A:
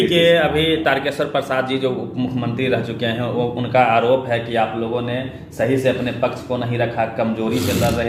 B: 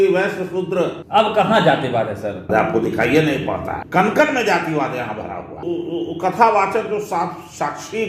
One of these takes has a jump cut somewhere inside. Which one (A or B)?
B